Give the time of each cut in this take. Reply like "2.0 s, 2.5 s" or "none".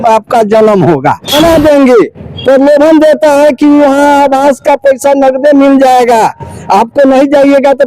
1.2 s